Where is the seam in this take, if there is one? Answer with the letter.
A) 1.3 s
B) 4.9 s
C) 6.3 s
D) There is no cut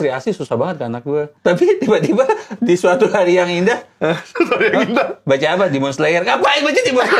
A